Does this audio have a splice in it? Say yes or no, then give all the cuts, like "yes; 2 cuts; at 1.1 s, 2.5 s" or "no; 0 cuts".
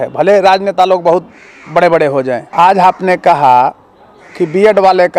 yes; 1 cut; at 2.4 s